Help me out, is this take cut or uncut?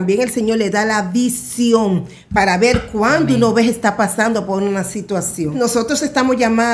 cut